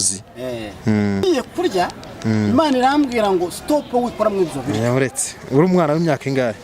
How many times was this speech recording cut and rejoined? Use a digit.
1